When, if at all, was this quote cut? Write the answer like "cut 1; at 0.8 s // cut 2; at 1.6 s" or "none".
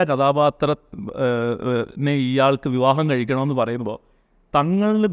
none

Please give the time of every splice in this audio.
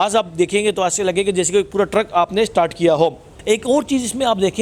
none

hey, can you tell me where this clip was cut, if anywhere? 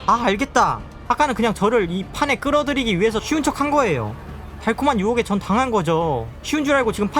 cut 1; at 1.0 s

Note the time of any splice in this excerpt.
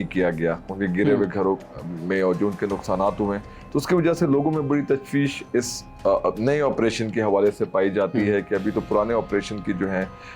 none

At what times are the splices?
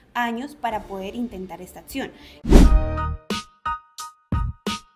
cut 1; at 2.2 s

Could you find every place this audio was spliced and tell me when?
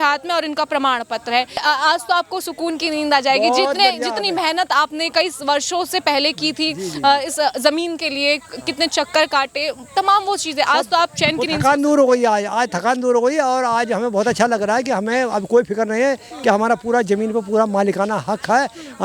cut 1; at 1.6 s

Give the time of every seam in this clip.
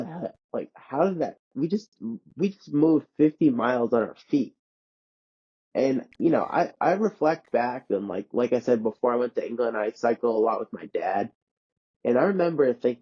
none

